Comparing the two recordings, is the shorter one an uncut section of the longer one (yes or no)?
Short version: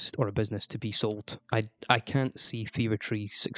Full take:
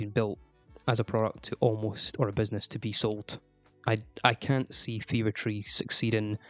no